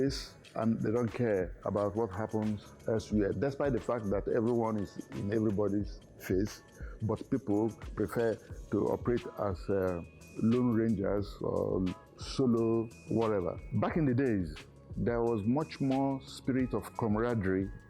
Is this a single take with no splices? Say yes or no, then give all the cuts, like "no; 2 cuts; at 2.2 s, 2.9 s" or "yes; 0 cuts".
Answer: yes; 0 cuts